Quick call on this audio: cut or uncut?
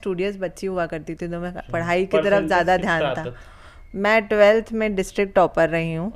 uncut